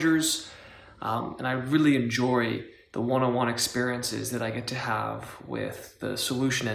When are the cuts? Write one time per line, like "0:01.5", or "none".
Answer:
none